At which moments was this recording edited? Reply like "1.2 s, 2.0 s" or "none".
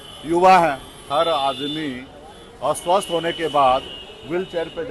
1.1 s